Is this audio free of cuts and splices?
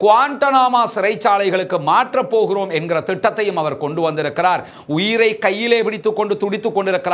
yes; 0 cuts

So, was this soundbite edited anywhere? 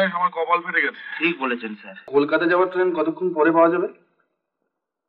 yes; 1 cut; at 2.1 s

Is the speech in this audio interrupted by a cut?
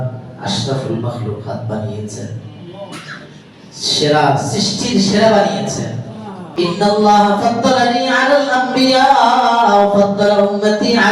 yes; 1 cut; at 6.5 s

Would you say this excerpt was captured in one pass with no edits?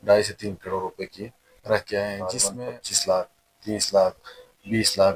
no; 1 cut; at 2.4 s

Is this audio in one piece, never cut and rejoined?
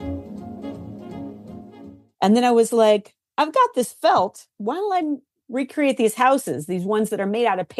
no; 1 cut; at 2.2 s

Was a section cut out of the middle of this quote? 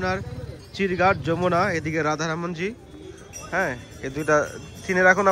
no; 0 cuts

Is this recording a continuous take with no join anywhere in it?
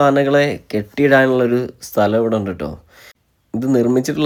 yes; 0 cuts

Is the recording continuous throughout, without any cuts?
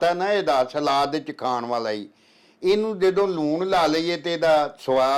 yes; 0 cuts

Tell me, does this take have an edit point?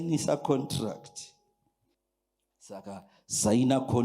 yes; 1 cut; at 1.9 s

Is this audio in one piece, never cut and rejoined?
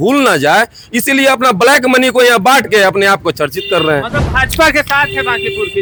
yes; 0 cuts

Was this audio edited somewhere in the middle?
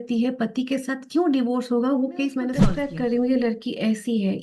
yes; 1 cut; at 2.6 s

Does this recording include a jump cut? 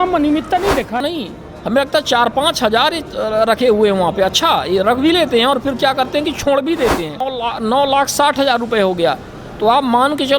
yes; 2 cuts; at 1.0 s, 7.3 s

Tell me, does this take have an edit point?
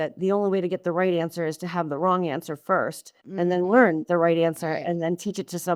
no; 0 cuts

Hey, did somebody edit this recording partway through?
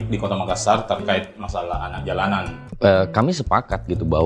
yes; 1 cut; at 2.6 s

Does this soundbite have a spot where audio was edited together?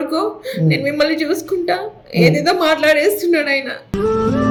no; 0 cuts

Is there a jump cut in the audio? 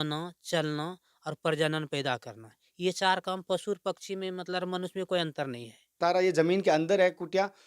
yes; 1 cut; at 6.0 s

